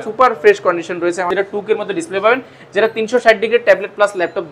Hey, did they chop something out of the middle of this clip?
yes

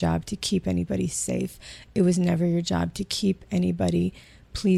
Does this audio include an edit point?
no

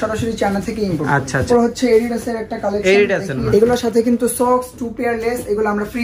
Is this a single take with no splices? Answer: no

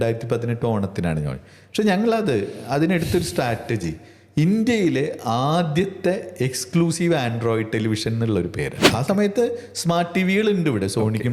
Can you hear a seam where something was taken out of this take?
yes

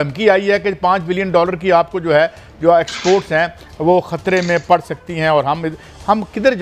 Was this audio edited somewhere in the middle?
no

